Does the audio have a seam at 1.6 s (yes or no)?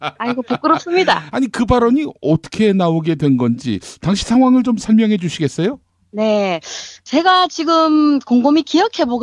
yes